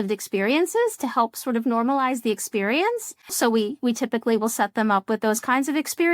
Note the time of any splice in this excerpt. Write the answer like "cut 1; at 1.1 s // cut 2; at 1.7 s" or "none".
cut 1; at 3.3 s

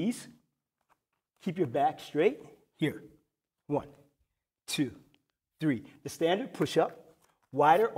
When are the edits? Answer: cut 1; at 2.0 s

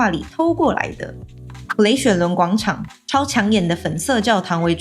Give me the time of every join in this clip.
cut 1; at 1.5 s // cut 2; at 2.9 s

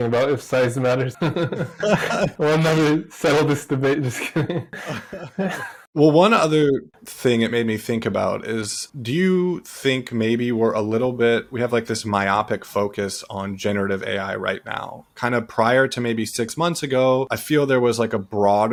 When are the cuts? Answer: none

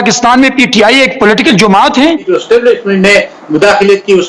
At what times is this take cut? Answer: cut 1; at 2.2 s

